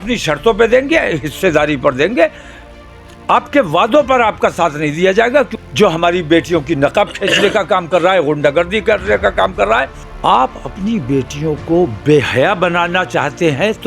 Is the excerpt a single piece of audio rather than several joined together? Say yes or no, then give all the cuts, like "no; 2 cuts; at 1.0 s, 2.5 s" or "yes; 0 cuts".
no; 2 cuts; at 5.6 s, 10.0 s